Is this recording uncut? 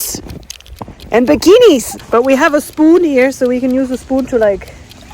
no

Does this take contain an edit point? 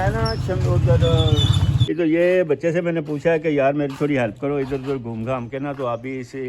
yes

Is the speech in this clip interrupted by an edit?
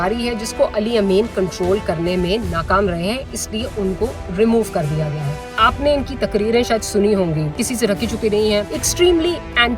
yes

